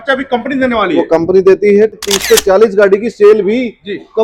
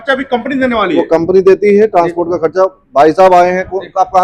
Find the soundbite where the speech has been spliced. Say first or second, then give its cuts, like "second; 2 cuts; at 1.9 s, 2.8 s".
first; 1 cut; at 1.9 s